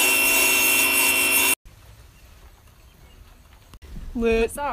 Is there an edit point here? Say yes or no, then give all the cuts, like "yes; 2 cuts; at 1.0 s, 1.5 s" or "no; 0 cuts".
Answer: no; 0 cuts